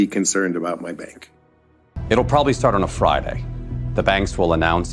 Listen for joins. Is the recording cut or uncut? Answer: cut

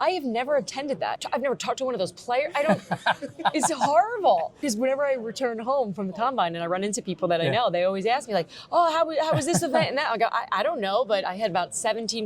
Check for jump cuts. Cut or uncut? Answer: cut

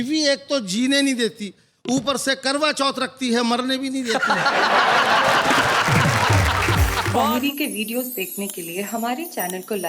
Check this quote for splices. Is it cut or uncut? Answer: cut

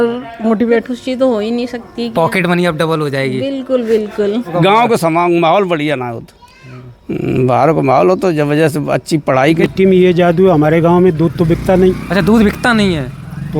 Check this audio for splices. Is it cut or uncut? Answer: cut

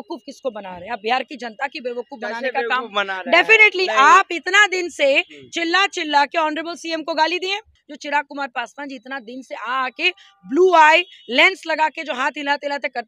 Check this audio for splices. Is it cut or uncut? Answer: cut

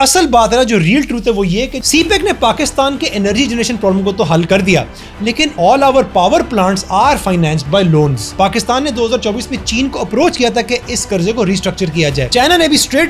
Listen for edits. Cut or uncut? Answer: cut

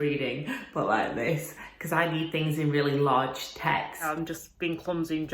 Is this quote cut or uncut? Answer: cut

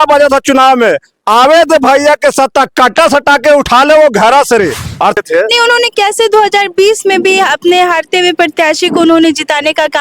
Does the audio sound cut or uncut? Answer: cut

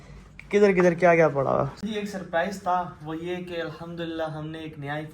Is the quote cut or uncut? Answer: cut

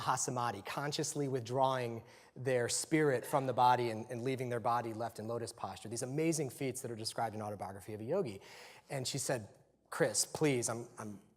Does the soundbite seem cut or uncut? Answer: cut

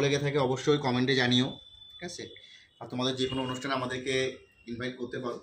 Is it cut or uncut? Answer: uncut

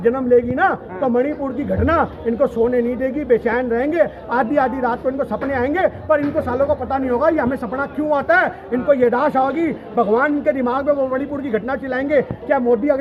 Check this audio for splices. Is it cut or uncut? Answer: uncut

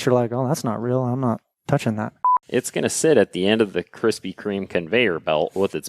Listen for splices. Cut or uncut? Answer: cut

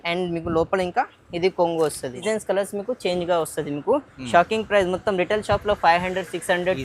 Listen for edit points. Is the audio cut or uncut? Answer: cut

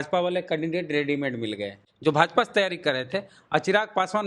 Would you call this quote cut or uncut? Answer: cut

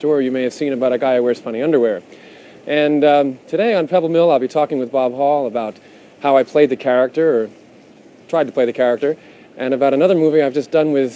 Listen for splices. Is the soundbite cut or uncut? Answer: cut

